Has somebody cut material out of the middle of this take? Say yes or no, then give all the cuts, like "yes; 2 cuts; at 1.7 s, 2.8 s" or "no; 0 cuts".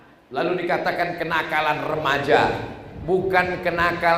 no; 0 cuts